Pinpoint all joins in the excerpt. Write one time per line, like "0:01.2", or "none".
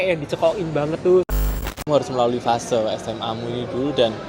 0:01.3